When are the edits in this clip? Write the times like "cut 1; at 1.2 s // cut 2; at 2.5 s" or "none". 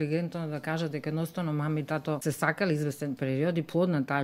cut 1; at 2.2 s